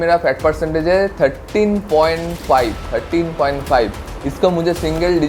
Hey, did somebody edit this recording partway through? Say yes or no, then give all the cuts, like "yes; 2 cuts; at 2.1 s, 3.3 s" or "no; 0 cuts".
no; 0 cuts